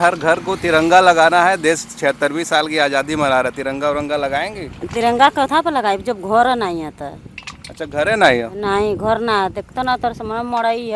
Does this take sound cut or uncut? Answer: uncut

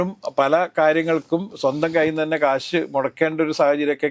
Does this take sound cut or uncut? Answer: uncut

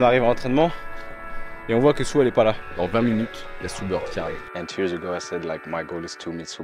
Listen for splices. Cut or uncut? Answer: cut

